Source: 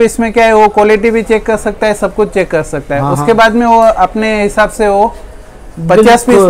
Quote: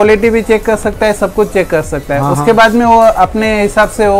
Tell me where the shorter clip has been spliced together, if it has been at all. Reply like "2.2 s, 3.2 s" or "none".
none